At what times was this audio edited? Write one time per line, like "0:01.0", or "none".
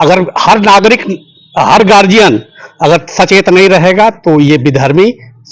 none

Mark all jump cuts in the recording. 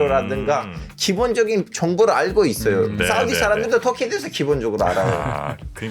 0:01.7

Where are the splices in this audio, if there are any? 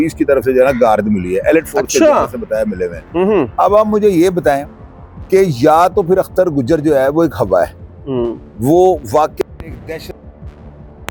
none

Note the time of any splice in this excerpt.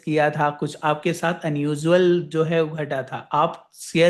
none

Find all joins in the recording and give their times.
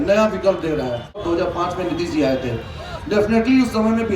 0:01.2

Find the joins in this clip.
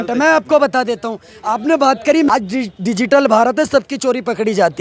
0:02.3

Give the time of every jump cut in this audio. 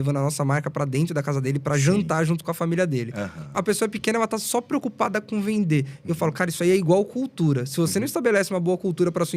0:03.5

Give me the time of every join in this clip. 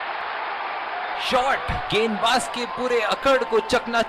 0:01.2

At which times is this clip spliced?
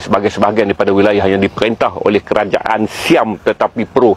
none

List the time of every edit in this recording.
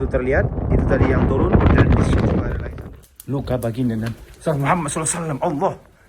0:02.6

